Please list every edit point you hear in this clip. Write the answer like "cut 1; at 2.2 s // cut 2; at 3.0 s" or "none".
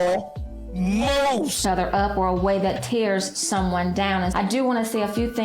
cut 1; at 1.6 s